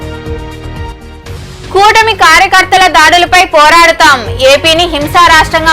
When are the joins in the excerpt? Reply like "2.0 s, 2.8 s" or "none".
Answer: 0.9 s